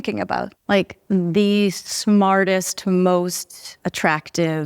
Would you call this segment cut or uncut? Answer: cut